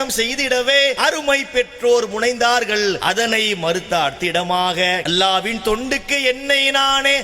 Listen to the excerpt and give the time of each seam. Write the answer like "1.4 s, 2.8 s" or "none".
1.0 s, 3.0 s, 5.0 s